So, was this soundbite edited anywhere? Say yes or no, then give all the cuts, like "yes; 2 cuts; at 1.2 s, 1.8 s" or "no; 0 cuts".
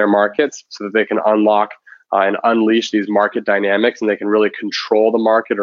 no; 0 cuts